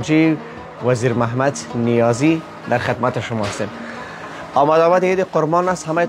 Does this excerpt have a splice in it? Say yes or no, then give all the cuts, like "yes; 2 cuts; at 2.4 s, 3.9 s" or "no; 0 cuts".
no; 0 cuts